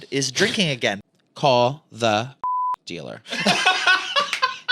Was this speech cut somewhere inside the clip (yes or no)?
yes